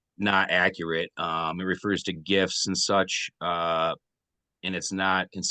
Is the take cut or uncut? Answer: uncut